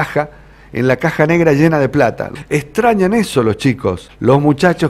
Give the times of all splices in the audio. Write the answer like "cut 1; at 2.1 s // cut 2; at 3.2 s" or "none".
cut 1; at 2.2 s // cut 2; at 4.0 s